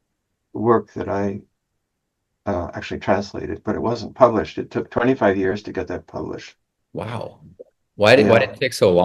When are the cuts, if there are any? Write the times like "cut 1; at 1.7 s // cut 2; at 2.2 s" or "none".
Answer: cut 1; at 3.7 s